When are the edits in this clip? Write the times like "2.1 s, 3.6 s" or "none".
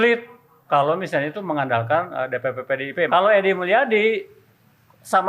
3.1 s